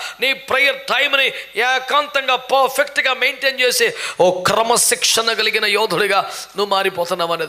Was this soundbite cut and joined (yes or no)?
no